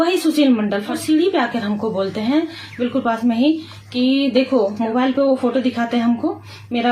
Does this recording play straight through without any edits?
no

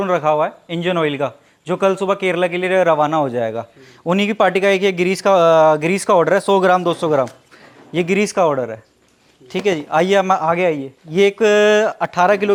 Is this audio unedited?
yes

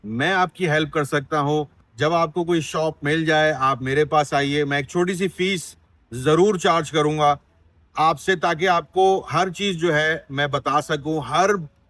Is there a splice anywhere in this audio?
no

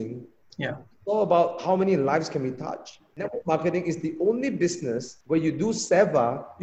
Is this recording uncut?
no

